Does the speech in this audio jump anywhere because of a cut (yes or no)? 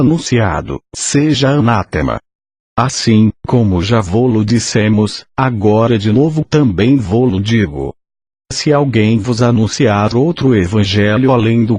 no